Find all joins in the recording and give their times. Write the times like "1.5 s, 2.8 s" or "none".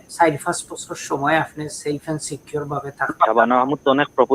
3.2 s